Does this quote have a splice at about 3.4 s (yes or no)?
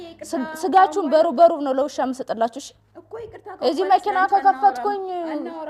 no